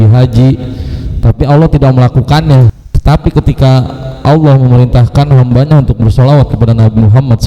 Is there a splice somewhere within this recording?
yes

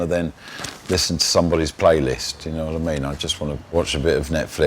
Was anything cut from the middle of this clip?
yes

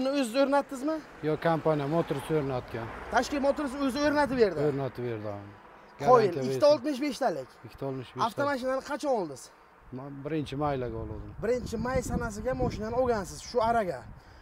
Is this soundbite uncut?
yes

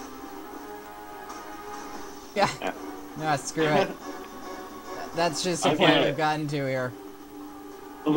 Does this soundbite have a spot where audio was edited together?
no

